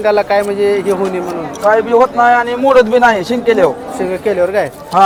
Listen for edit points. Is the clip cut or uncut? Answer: uncut